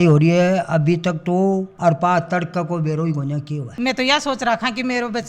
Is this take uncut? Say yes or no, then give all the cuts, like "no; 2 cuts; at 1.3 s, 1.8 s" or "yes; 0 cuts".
no; 1 cut; at 3.7 s